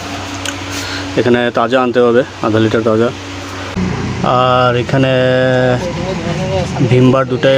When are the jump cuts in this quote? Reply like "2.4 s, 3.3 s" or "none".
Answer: 3.6 s